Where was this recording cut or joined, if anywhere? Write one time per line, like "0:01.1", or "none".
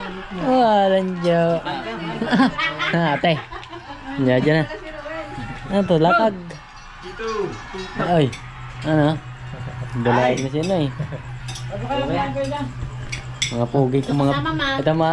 none